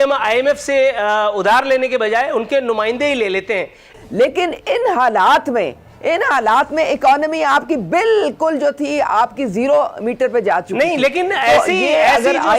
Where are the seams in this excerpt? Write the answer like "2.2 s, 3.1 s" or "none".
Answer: 3.9 s